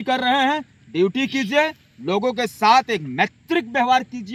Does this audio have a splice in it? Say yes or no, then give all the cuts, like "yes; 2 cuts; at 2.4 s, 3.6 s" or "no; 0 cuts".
no; 0 cuts